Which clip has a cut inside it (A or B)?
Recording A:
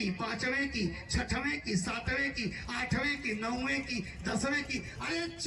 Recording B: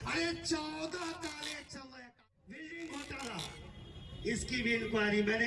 B